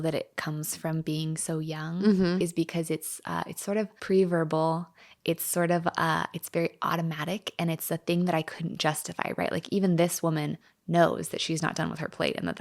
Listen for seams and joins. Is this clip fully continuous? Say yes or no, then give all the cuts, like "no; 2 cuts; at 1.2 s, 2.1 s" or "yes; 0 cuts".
no; 1 cut; at 4.0 s